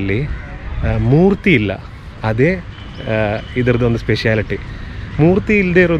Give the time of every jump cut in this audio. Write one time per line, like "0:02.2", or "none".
none